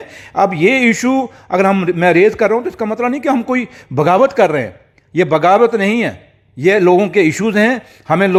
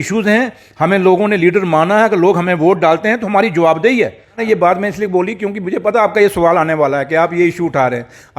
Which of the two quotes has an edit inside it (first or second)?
second